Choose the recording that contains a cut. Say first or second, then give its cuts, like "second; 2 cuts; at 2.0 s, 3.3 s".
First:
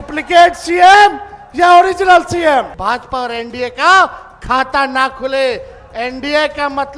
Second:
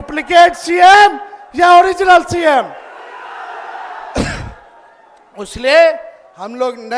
first; 1 cut; at 2.7 s